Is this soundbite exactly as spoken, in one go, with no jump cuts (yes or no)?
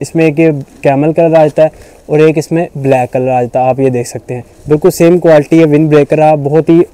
yes